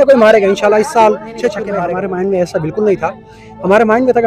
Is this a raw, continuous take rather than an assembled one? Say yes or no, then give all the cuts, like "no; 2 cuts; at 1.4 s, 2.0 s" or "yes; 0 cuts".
no; 1 cut; at 1.7 s